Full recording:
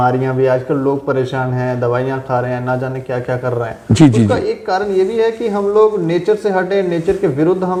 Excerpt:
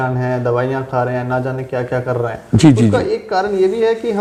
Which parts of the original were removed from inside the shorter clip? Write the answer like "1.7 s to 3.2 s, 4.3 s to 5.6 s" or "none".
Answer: none